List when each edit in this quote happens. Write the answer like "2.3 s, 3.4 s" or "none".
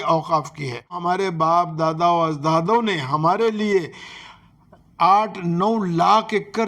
1.0 s